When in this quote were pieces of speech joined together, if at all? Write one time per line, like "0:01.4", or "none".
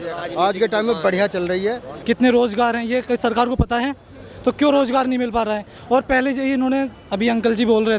0:01.9